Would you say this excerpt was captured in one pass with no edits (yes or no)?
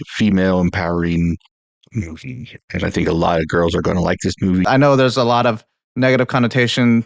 no